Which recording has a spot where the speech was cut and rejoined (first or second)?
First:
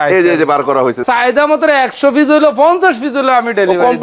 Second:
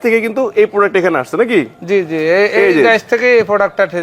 first